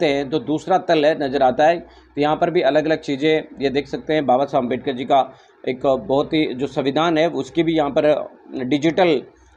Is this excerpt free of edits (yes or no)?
yes